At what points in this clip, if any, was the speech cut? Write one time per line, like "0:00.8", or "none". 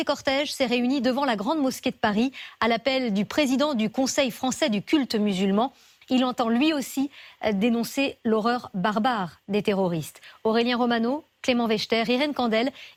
none